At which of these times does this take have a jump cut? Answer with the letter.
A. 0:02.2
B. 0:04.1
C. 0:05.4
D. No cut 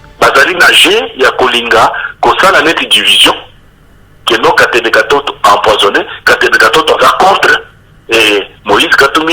D